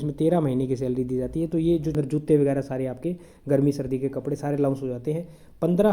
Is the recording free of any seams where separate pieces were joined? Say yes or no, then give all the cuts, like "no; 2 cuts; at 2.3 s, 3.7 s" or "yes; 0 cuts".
no; 1 cut; at 2.0 s